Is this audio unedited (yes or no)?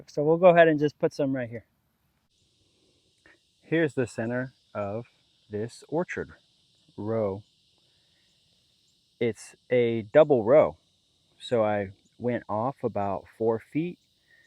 no